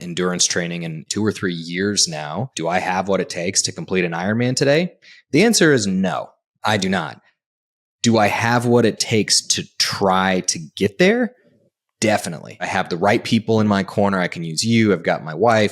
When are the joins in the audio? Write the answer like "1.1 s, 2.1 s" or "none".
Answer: 1.0 s, 2.5 s, 12.7 s